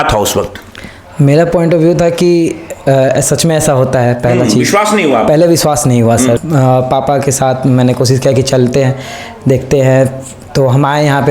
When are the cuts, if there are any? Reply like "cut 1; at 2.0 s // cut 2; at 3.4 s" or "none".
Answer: cut 1; at 6.4 s